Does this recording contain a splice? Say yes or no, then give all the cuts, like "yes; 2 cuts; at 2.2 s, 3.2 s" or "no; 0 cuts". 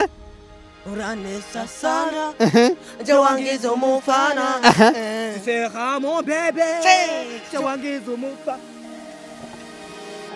yes; 1 cut; at 8.6 s